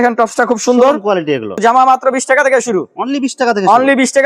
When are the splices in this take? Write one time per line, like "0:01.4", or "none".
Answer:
0:01.6